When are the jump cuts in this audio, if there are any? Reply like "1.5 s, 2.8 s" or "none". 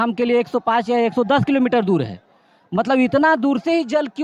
none